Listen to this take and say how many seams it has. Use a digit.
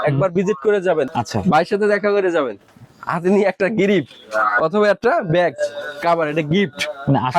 1